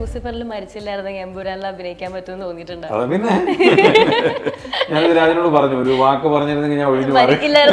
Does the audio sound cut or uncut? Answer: uncut